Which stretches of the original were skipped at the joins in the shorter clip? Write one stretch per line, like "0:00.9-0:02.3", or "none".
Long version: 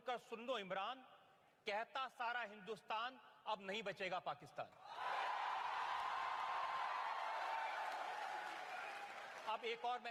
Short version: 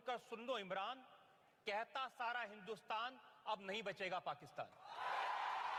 none